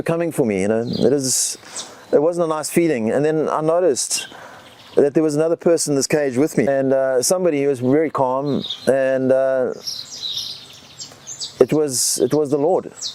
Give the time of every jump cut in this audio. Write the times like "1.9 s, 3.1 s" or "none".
none